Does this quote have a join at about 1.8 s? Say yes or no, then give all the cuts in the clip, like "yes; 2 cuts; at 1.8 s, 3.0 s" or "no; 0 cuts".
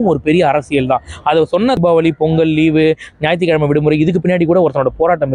yes; 1 cut; at 1.8 s